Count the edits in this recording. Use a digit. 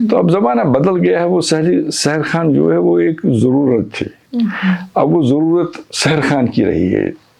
0